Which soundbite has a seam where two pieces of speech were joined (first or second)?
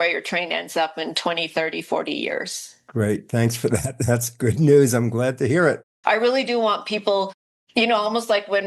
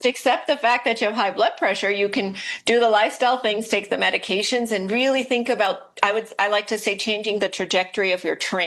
first